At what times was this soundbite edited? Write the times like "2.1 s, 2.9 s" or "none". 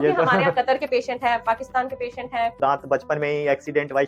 2.6 s